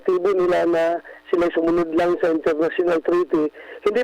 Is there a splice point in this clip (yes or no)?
no